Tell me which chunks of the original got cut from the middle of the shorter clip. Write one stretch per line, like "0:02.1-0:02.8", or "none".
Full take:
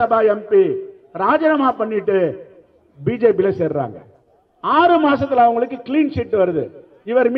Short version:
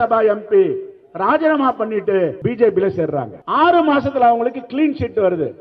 0:02.4-0:03.0
0:04.0-0:04.5